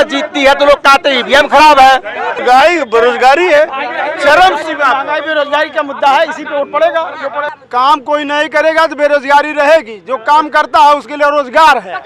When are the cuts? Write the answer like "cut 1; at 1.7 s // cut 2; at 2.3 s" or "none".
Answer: cut 1; at 2.4 s // cut 2; at 7.6 s